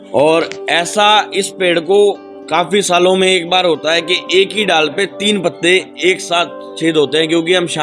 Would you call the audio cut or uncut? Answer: uncut